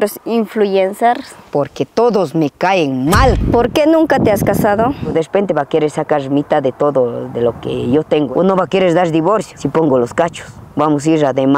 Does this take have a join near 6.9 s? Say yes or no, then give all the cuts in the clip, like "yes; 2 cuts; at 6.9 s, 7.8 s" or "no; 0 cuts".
no; 4 cuts; at 1.3 s, 3.4 s, 5.1 s, 8.3 s